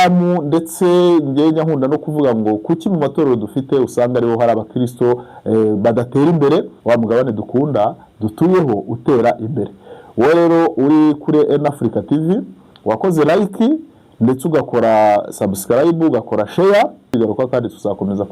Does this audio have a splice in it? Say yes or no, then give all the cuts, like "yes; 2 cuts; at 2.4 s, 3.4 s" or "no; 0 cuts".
yes; 2 cuts; at 6.7 s, 17.1 s